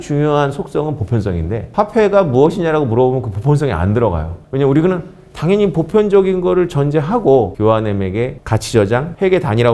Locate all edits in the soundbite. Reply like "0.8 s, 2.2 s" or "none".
none